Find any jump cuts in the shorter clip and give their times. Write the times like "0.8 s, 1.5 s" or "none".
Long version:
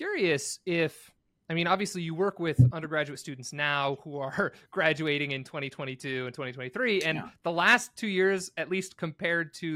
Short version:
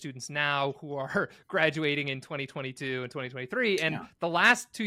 none